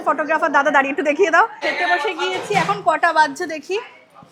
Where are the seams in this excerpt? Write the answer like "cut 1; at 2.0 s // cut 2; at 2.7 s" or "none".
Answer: cut 1; at 1.6 s